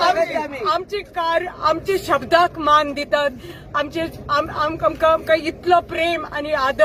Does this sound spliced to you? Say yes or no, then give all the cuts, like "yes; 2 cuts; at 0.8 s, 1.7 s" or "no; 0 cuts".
no; 0 cuts